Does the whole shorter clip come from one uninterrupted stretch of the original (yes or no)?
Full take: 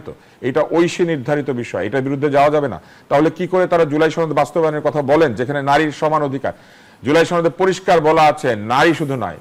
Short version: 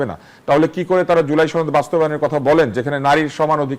yes